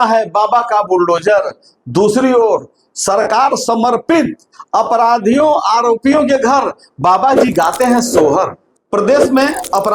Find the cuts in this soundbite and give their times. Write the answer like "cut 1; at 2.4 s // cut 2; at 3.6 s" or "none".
cut 1; at 8.6 s